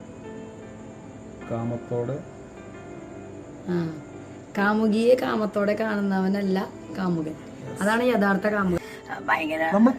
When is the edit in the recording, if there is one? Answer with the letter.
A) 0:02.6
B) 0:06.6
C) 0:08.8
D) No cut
C